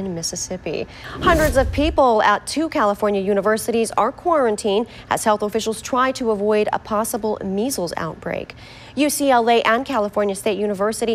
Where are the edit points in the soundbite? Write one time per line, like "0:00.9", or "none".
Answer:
0:01.0